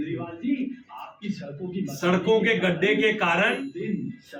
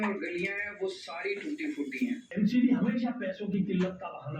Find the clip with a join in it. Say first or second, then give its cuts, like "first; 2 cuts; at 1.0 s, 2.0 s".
second; 1 cut; at 2.2 s